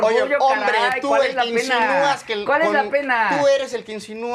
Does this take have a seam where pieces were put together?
no; 0 cuts

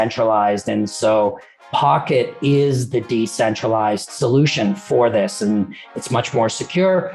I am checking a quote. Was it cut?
yes; 1 cut; at 6.0 s

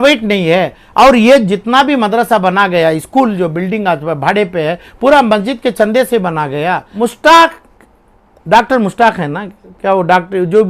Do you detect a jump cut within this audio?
yes; 1 cut; at 6.8 s

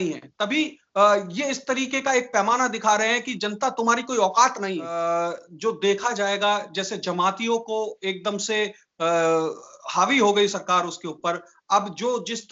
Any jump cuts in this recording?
yes; 1 cut; at 4.9 s

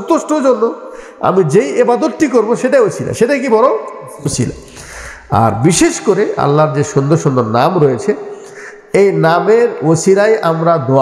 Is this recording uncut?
yes; 0 cuts

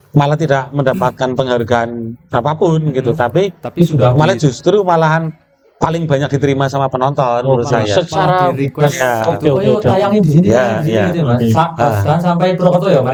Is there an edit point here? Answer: no; 0 cuts

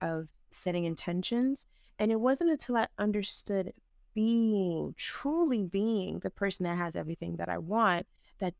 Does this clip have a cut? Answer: no; 0 cuts

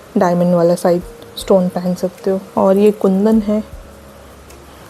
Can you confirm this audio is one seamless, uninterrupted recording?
no; 1 cut; at 2.5 s

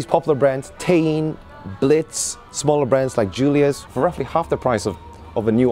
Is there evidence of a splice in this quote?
yes; 1 cut; at 3.8 s

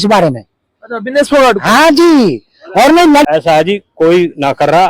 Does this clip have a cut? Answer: yes; 1 cut; at 3.2 s

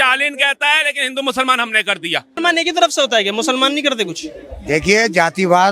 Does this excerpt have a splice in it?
yes; 1 cut; at 2.4 s

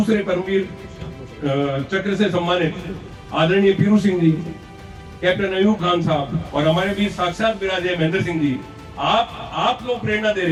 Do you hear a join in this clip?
no; 0 cuts

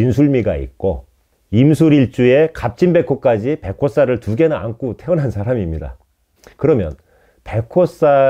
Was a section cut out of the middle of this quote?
no; 0 cuts

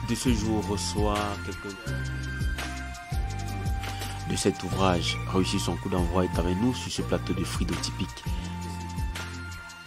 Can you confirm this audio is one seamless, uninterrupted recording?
yes; 0 cuts

